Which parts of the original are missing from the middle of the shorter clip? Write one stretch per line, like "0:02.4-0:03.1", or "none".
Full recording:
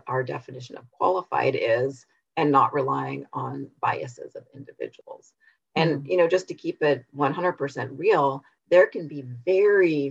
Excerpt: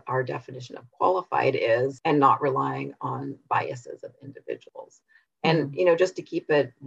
0:02.0-0:02.3